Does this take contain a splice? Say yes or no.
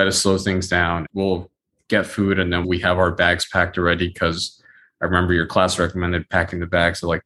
yes